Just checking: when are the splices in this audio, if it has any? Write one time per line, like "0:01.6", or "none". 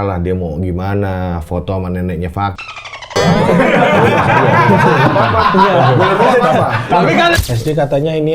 0:07.4